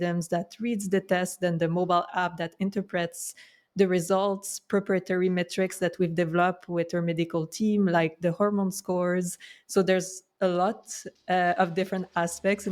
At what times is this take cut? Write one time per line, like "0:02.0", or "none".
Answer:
none